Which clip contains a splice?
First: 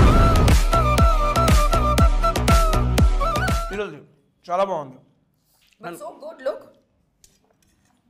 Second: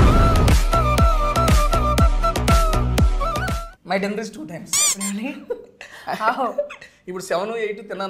second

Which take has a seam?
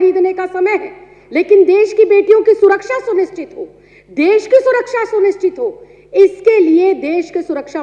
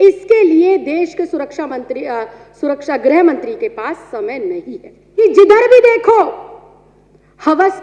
second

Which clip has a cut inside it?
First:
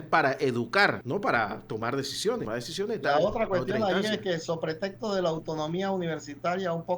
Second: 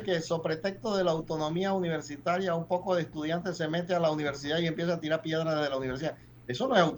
first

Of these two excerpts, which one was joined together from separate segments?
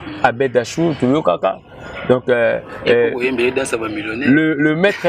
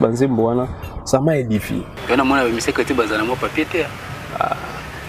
second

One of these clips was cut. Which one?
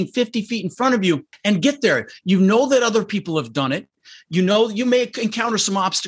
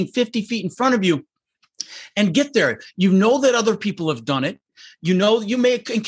first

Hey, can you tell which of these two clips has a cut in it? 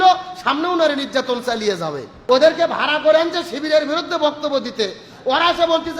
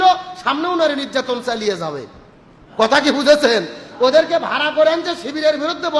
first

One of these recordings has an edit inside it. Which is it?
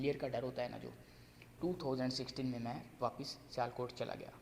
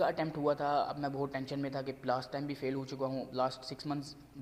first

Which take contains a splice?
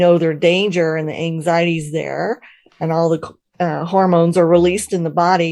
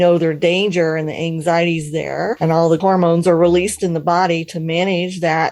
second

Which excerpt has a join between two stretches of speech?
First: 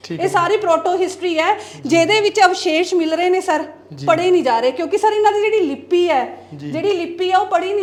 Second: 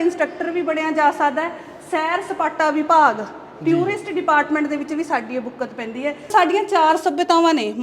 second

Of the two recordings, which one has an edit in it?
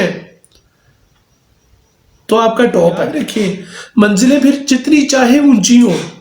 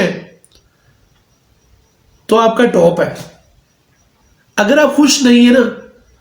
first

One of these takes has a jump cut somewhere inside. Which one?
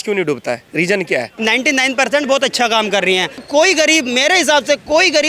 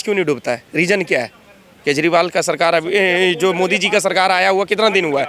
first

